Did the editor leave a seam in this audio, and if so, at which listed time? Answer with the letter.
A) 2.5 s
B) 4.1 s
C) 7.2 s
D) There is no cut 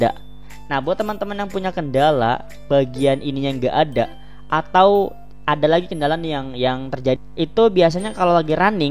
C